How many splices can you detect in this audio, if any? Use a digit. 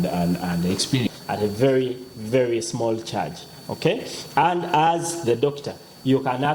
1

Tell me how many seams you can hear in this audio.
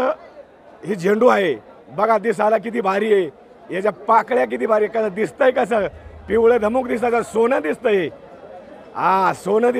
0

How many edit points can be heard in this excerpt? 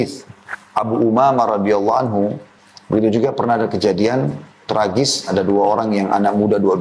1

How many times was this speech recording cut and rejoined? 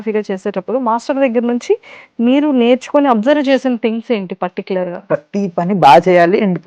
1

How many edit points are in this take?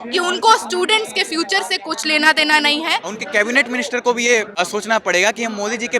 2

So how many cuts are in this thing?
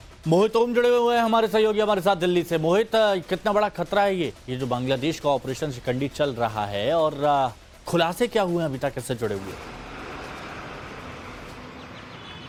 0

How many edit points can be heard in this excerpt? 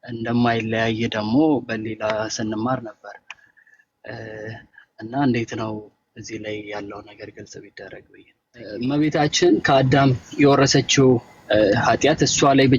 1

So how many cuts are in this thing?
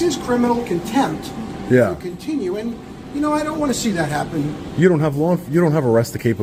0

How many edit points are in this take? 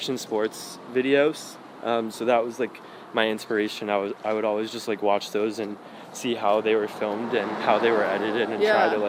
0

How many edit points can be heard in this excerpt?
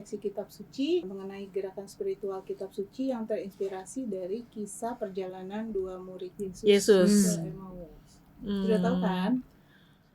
2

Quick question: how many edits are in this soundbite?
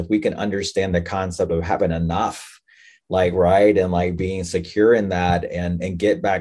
0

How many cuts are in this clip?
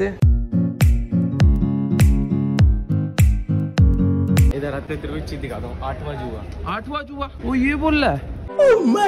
2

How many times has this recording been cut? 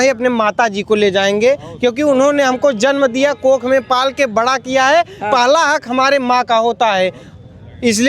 0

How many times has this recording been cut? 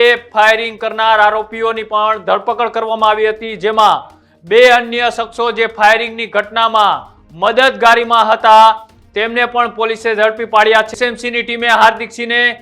1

